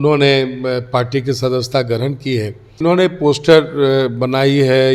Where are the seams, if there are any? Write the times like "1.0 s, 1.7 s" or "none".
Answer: 2.8 s